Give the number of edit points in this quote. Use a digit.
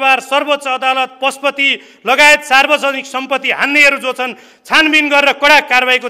0